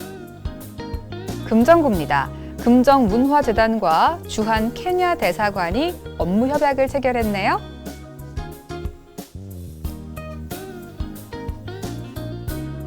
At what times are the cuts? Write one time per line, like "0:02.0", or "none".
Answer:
0:01.5
0:07.6
0:12.1